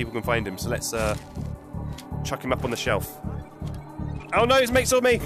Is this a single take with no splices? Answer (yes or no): yes